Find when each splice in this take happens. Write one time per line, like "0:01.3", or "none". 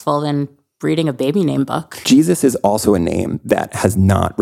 0:01.9